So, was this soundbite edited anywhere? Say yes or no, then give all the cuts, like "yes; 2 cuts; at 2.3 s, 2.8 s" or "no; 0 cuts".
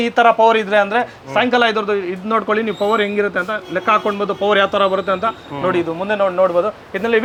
no; 0 cuts